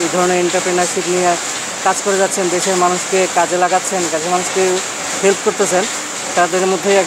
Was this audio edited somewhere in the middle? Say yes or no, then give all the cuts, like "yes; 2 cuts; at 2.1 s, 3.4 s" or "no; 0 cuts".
no; 0 cuts